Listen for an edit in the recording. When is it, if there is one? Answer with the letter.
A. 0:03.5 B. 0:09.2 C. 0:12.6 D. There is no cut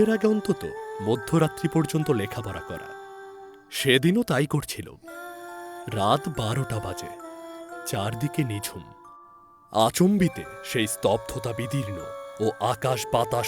D